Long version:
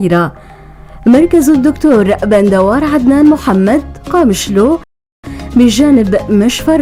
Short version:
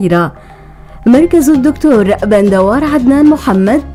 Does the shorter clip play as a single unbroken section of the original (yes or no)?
yes